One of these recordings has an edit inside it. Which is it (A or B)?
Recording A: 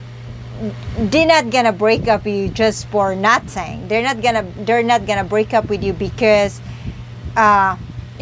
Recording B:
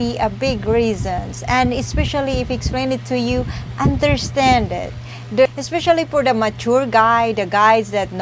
B